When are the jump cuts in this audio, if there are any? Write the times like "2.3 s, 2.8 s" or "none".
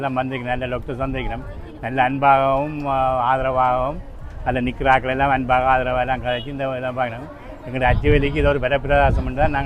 none